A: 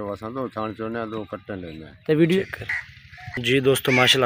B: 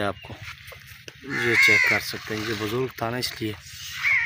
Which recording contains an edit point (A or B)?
A